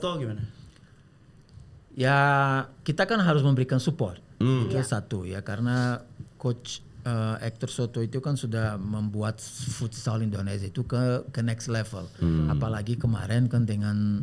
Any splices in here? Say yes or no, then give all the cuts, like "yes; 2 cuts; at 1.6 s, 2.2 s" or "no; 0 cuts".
no; 0 cuts